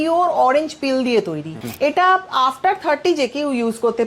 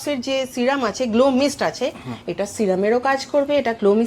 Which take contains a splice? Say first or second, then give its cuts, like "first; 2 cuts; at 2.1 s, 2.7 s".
first; 1 cut; at 1.6 s